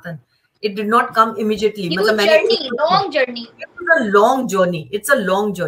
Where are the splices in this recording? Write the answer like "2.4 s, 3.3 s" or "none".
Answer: none